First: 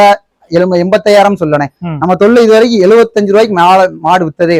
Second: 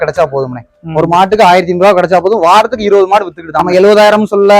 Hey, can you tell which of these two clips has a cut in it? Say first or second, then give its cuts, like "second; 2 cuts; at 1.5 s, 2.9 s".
second; 1 cut; at 3.5 s